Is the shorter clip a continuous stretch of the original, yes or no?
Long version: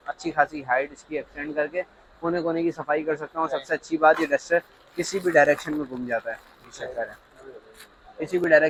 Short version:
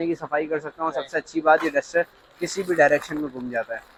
yes